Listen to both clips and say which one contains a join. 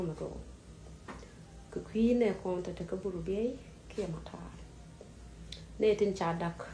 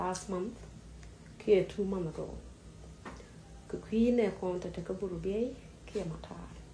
first; 1 cut; at 5.7 s

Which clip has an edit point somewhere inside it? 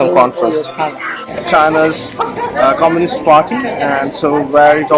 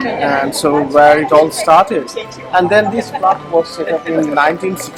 first; 1 cut; at 1.2 s

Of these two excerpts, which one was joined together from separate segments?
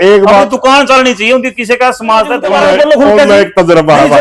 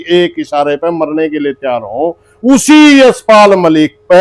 first; 1 cut; at 2.5 s

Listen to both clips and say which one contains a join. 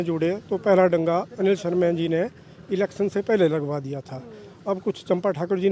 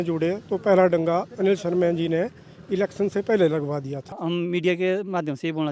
second; 1 cut; at 4.2 s

